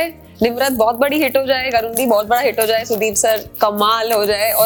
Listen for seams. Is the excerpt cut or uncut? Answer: uncut